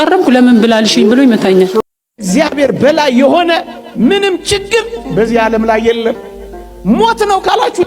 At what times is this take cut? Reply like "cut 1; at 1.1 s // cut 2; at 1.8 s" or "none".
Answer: cut 1; at 1.8 s